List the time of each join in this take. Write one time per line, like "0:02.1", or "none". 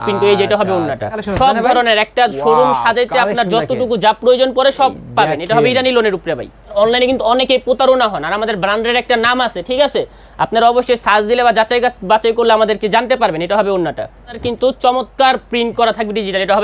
0:01.2
0:06.7
0:14.4